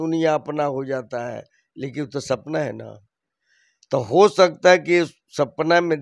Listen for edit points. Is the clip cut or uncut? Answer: uncut